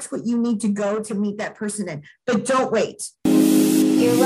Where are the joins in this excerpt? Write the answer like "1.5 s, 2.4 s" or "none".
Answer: 3.1 s